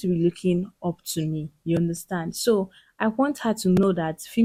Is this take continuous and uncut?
yes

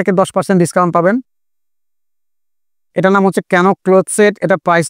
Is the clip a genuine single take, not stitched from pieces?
no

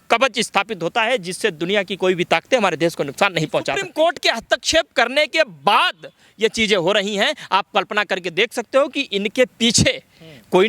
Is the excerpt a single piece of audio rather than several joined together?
no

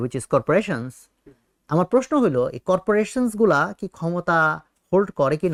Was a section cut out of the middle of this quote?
no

